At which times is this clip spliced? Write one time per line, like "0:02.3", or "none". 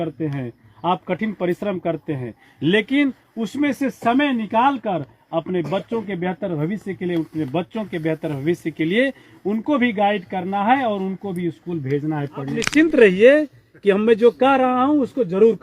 0:12.6